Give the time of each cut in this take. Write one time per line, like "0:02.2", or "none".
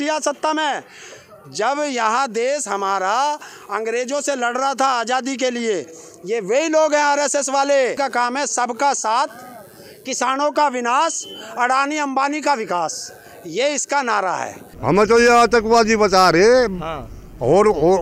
0:08.0
0:14.7